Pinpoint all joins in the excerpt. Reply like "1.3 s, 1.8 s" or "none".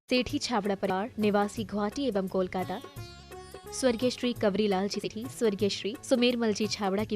0.9 s, 5.1 s